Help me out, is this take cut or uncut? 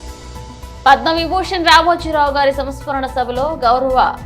uncut